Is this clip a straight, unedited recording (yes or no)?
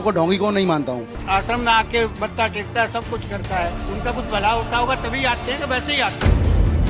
yes